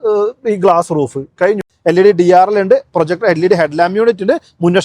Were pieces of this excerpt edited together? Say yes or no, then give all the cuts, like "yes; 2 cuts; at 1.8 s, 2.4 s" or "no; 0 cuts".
yes; 1 cut; at 1.7 s